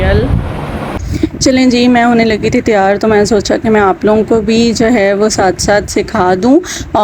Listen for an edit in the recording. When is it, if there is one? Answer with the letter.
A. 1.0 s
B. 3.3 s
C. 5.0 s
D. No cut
A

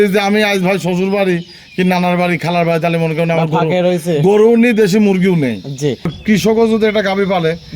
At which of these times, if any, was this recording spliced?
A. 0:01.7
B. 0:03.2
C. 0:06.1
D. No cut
C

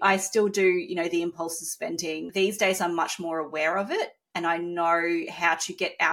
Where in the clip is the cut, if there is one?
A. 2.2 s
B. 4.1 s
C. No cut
A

